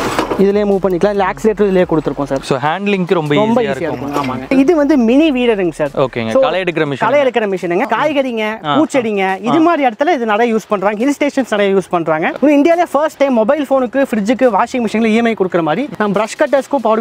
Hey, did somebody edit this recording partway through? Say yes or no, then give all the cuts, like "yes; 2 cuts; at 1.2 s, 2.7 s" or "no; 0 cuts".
yes; 4 cuts; at 4.5 s, 7.9 s, 12.3 s, 15.9 s